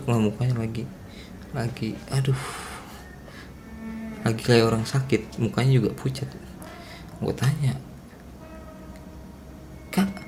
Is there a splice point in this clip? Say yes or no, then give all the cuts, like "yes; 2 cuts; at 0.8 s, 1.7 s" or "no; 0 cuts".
no; 0 cuts